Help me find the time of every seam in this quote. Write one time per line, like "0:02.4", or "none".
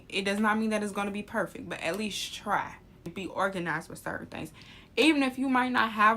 0:03.0